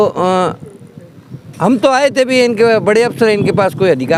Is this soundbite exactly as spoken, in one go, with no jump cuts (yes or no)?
yes